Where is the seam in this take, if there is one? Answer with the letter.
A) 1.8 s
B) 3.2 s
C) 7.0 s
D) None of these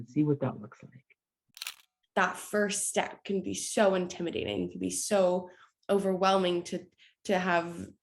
A